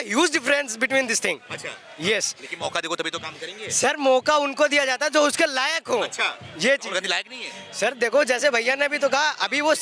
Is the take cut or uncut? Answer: uncut